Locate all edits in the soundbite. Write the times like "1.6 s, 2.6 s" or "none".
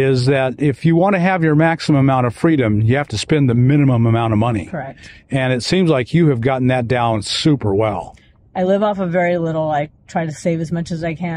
none